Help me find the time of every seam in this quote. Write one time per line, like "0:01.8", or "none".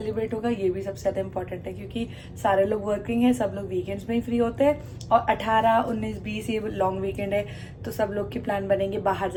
none